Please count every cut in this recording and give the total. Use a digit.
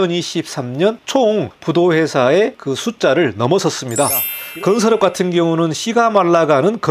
3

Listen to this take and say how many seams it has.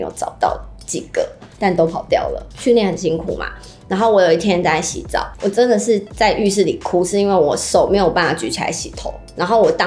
1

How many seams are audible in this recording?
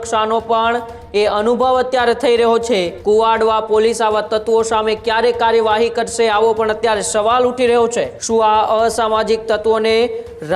2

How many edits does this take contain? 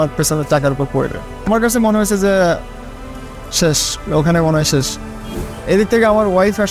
2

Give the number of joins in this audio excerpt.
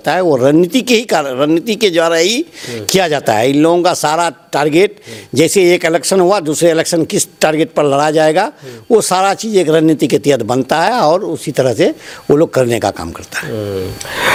0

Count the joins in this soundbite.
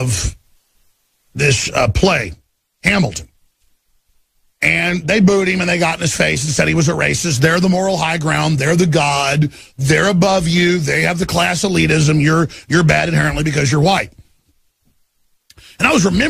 1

